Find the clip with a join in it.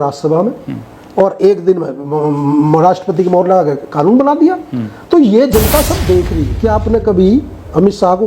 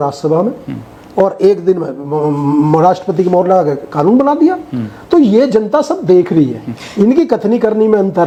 first; 1 cut; at 6.4 s

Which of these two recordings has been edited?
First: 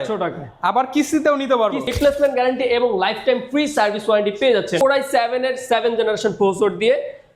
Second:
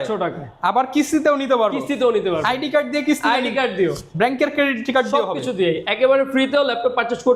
first; 2 cuts; at 1.9 s, 4.8 s

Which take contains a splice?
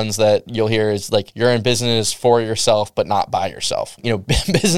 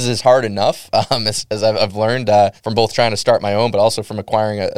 first; 2 cuts; at 1.3 s, 4.0 s

